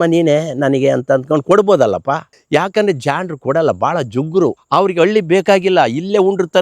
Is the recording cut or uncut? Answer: cut